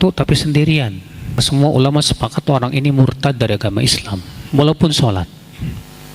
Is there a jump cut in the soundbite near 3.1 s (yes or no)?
no